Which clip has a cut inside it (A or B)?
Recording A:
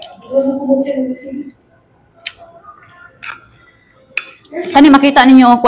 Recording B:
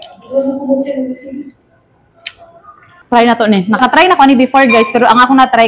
B